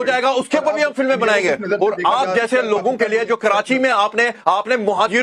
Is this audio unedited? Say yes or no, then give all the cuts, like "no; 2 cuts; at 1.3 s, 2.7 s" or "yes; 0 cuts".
yes; 0 cuts